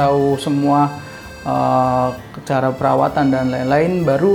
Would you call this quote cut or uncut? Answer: uncut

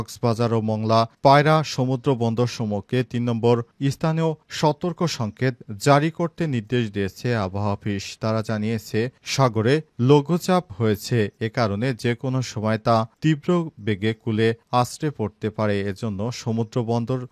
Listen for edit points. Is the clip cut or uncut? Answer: uncut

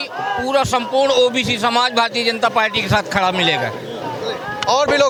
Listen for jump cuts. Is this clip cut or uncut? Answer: uncut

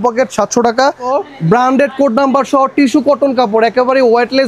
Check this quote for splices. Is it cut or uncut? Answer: cut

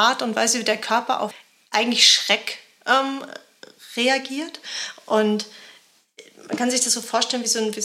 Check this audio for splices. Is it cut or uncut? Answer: cut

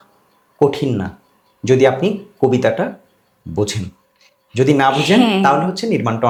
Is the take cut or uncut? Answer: uncut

